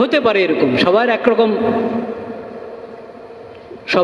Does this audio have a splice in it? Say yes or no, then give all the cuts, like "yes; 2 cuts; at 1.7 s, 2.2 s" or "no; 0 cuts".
no; 0 cuts